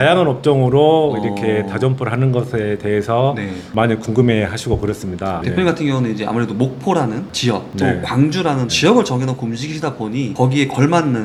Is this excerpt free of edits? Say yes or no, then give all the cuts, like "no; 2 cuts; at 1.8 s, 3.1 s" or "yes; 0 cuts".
yes; 0 cuts